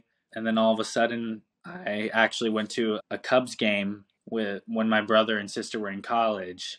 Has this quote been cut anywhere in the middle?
yes; 1 cut; at 3.0 s

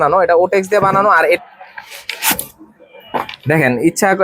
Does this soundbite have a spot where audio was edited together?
yes; 1 cut; at 1.4 s

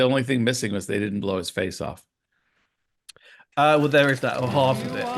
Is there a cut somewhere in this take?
no; 0 cuts

